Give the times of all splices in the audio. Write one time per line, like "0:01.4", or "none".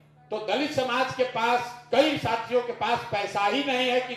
none